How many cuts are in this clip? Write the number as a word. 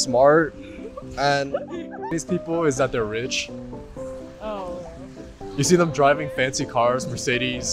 one